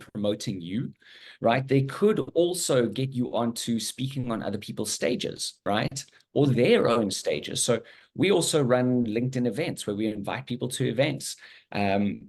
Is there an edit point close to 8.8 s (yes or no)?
no